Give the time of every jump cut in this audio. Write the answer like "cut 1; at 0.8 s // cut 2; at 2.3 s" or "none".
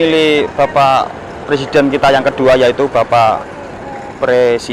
none